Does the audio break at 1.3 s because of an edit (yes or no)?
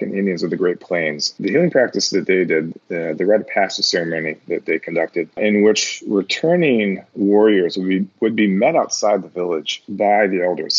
yes